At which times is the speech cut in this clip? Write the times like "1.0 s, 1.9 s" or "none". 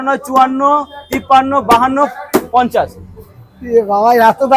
none